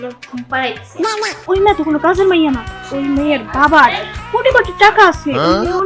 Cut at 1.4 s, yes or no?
yes